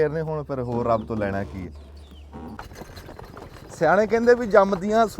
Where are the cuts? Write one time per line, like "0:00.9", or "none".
0:02.6